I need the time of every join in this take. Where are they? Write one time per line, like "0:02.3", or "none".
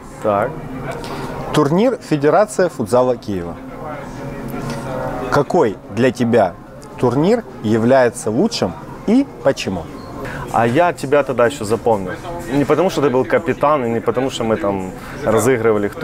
0:10.2